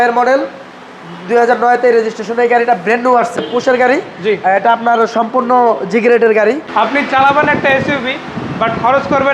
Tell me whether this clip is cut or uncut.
cut